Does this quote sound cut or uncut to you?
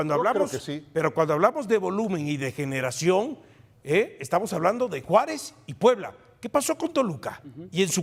uncut